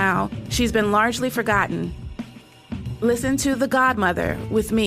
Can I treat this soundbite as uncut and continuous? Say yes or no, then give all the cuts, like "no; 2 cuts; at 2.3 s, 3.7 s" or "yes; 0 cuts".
yes; 0 cuts